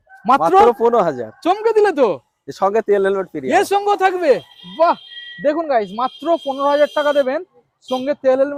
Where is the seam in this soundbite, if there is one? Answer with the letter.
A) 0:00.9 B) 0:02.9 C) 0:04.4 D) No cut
D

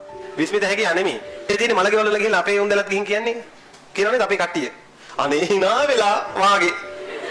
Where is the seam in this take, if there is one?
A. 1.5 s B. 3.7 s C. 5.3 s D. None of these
A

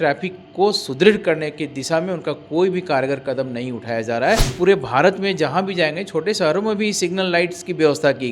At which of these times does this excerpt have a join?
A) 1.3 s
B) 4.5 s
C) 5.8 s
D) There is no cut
B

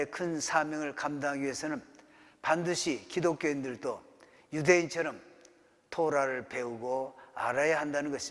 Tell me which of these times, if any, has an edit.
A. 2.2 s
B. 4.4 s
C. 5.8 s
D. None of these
D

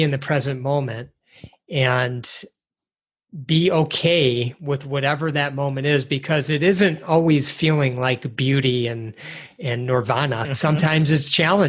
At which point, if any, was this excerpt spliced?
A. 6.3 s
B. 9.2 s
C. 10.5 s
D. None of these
C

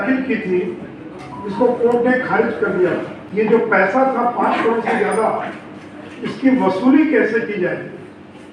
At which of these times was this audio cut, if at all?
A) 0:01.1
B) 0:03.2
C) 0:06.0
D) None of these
B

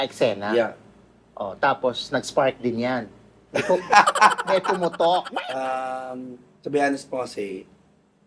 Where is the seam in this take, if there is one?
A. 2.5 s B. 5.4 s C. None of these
B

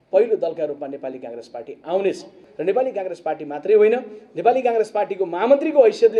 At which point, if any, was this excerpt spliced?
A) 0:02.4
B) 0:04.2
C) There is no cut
A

